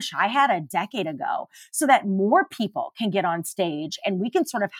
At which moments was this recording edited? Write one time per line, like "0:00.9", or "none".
none